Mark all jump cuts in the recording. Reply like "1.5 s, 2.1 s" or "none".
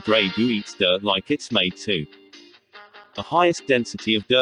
none